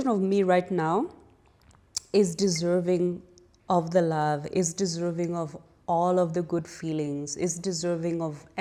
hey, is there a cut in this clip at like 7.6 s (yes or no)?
no